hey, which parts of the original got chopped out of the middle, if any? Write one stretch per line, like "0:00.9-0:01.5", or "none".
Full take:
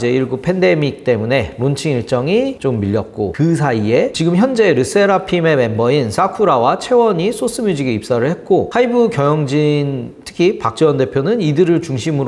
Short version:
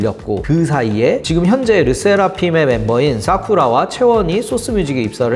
none